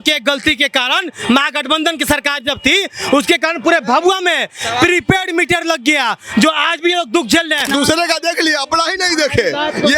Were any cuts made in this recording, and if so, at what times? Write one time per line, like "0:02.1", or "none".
0:07.6

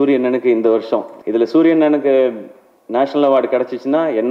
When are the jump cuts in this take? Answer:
0:01.1

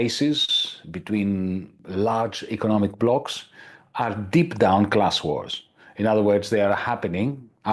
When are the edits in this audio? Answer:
0:01.8

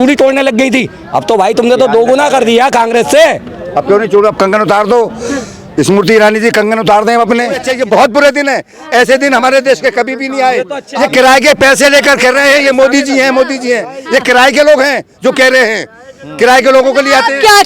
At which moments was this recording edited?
0:07.7
0:10.8

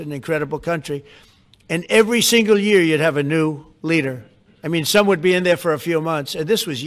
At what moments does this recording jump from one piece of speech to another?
none

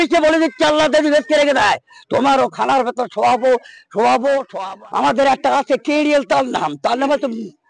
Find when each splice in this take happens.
0:04.5

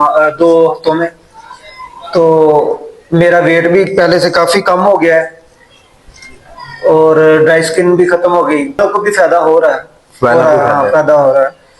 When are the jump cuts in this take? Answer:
0:08.8

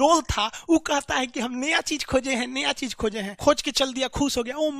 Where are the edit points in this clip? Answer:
0:03.3

